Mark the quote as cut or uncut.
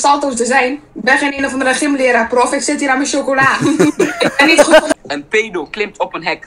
cut